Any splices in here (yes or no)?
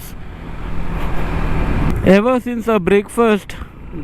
yes